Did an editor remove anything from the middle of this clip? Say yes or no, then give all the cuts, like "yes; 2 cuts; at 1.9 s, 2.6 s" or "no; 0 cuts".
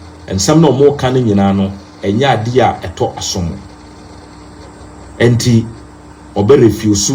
no; 0 cuts